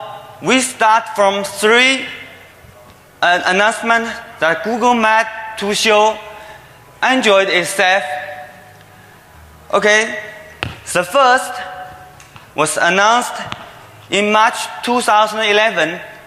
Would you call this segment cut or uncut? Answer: cut